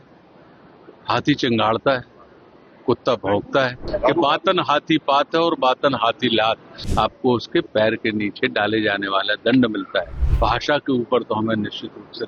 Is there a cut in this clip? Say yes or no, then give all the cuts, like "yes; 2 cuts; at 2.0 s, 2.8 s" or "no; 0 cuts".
yes; 3 cuts; at 3.8 s, 6.8 s, 10.2 s